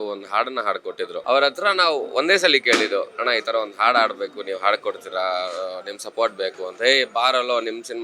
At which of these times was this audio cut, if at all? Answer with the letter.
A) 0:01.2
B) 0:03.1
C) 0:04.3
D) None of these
A